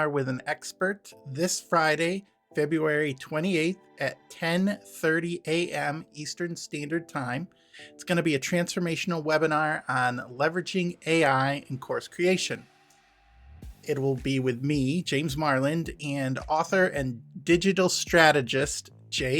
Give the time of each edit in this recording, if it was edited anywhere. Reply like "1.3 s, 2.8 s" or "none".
17.2 s